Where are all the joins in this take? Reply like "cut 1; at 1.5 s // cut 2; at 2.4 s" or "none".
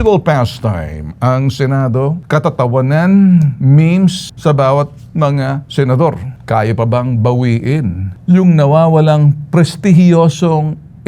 cut 1; at 2.2 s // cut 2; at 4.3 s // cut 3; at 6.3 s // cut 4; at 8.1 s